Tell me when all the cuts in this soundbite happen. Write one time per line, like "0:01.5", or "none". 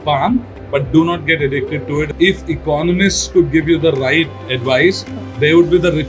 0:02.1